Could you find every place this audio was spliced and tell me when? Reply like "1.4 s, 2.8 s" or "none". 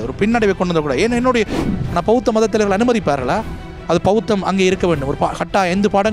1.6 s